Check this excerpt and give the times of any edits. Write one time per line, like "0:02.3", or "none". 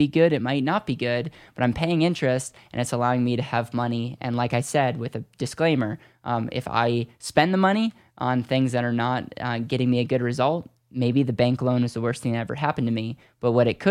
none